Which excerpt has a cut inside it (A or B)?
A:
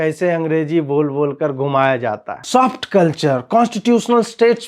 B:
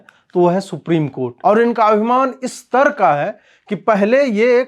B